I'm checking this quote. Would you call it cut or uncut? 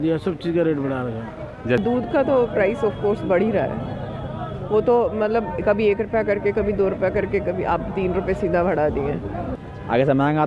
cut